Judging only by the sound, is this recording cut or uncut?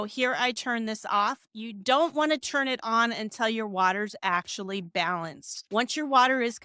cut